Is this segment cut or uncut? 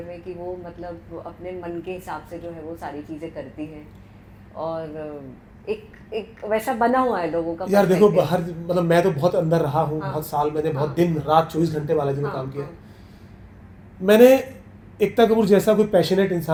uncut